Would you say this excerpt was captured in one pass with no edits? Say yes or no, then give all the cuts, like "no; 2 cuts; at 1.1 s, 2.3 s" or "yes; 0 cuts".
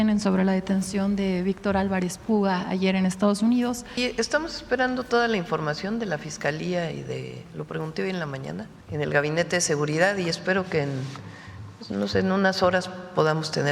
no; 2 cuts; at 4.0 s, 8.8 s